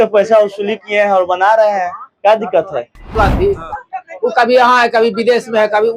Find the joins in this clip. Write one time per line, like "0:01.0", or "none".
0:03.1